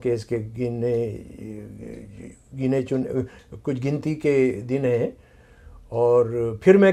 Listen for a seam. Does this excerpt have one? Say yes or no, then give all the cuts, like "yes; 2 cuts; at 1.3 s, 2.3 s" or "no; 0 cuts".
no; 0 cuts